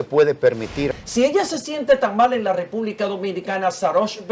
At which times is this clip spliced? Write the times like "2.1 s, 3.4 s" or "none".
0.9 s